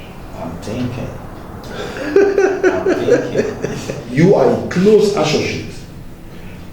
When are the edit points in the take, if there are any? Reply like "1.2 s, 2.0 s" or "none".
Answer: 4.0 s